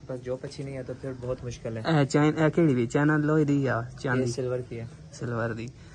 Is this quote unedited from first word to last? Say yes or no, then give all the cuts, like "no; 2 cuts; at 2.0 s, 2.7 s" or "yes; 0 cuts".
yes; 0 cuts